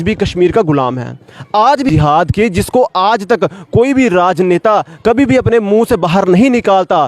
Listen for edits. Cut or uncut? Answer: cut